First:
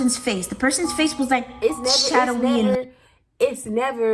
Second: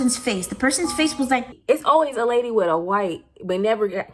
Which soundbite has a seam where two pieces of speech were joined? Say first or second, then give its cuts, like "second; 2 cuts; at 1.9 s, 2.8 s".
second; 1 cut; at 1.5 s